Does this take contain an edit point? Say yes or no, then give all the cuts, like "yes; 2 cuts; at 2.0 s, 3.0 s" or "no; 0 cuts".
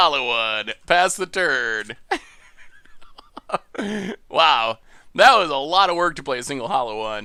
no; 0 cuts